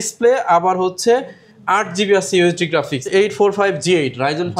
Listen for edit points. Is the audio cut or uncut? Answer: cut